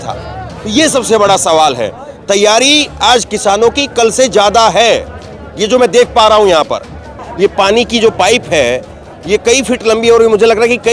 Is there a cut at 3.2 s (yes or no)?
no